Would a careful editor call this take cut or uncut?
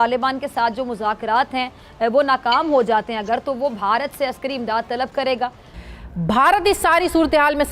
cut